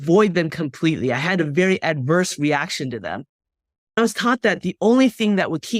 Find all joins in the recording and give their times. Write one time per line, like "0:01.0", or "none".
0:04.0